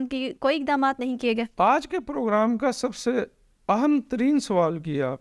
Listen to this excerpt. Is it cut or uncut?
uncut